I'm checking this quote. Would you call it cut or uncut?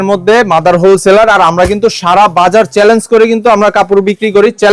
uncut